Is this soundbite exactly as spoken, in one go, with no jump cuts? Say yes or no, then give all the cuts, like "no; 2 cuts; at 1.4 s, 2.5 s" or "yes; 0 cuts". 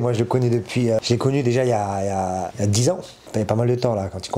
no; 3 cuts; at 1.0 s, 2.5 s, 3.2 s